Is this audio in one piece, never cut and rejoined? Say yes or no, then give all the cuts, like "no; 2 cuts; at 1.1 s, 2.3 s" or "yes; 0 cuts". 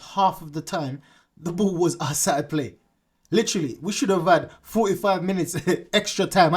yes; 0 cuts